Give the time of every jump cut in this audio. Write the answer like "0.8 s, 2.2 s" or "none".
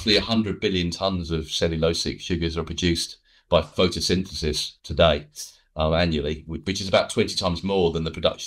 none